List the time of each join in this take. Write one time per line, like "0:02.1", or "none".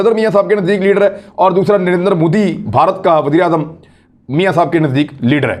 none